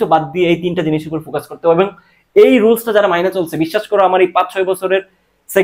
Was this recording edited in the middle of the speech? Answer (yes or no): no